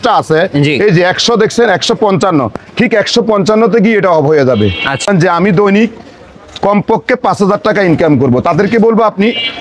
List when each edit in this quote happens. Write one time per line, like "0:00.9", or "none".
0:05.0